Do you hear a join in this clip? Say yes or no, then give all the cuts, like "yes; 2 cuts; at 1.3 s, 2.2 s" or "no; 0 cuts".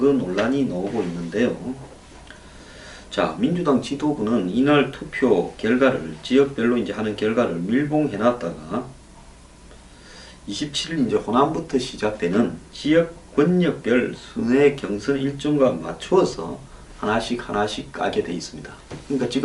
no; 0 cuts